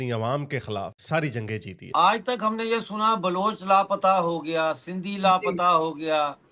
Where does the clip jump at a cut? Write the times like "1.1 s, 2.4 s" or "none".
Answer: 1.9 s